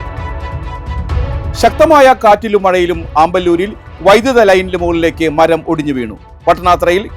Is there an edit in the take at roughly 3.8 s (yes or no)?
no